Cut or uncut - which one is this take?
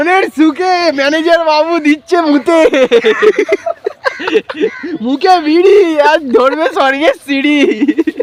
uncut